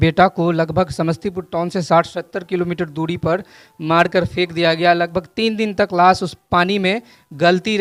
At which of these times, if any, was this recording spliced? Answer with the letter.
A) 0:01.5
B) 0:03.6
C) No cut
C